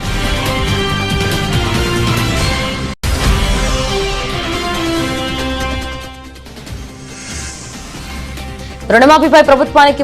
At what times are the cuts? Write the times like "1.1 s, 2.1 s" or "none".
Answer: 2.9 s